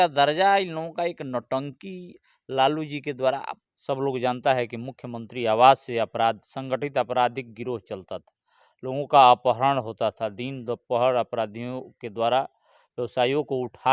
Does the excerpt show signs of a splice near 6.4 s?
no; 1 cut; at 3.5 s

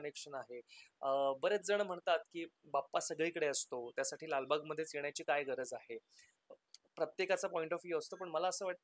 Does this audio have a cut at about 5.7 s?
no; 0 cuts

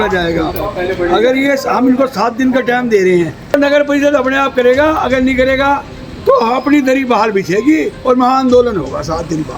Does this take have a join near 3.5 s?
yes; 1 cut; at 3.5 s

